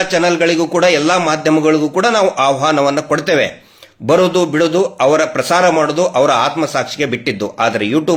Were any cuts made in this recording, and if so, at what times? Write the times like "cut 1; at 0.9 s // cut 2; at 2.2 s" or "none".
none